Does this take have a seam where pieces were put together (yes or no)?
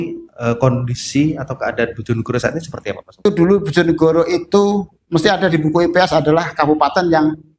yes